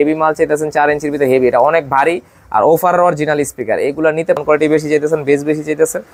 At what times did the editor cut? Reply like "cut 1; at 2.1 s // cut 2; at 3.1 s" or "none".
cut 1; at 4.4 s

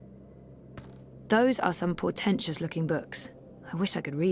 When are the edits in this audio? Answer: cut 1; at 1.2 s

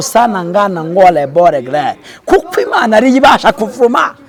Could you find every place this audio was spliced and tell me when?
none

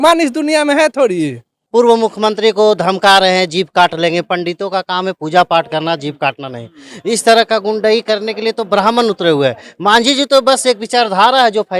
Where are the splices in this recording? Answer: cut 1; at 1.5 s

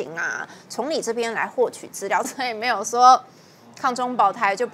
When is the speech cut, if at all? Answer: cut 1; at 2.3 s

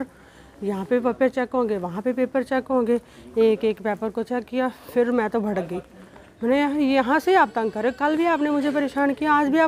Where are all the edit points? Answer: none

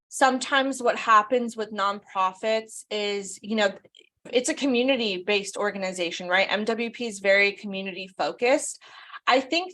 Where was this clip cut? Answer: cut 1; at 4.3 s

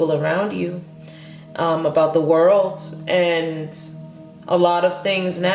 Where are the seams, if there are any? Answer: none

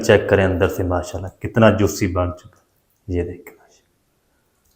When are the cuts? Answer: none

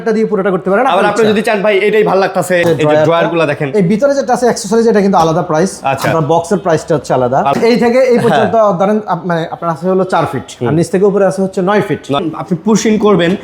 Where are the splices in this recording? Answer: cut 1; at 2.6 s // cut 2; at 7.5 s // cut 3; at 12.2 s

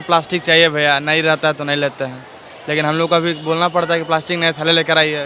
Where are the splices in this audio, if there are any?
none

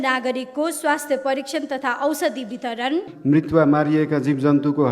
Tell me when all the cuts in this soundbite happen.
cut 1; at 3.1 s

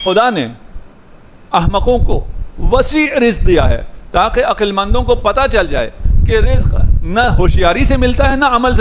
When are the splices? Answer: none

